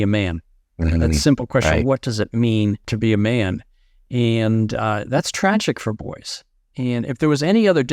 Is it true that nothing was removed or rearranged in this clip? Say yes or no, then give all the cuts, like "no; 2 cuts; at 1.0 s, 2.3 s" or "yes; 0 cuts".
no; 1 cut; at 2.9 s